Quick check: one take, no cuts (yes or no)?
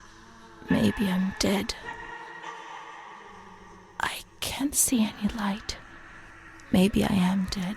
no